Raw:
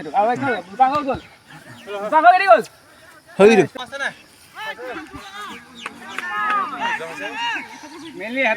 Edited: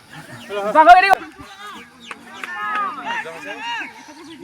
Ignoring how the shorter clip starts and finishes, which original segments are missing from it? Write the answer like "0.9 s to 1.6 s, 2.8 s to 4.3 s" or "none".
2.5 s to 4.9 s